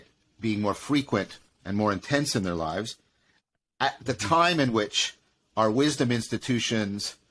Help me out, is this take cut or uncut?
uncut